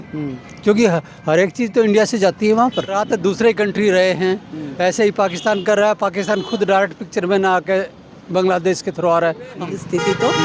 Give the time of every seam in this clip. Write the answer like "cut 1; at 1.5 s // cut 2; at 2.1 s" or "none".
cut 1; at 2.9 s // cut 2; at 9.5 s